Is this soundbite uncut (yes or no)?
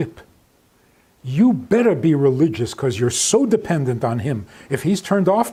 yes